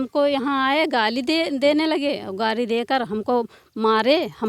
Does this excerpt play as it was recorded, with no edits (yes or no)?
yes